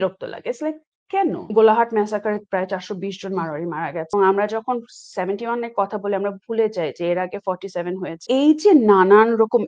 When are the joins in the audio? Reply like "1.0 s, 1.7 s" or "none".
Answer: 1.4 s, 4.1 s, 8.2 s